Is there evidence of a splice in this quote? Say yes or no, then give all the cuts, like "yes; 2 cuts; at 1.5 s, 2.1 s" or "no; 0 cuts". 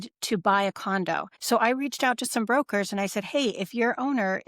yes; 1 cut; at 1.3 s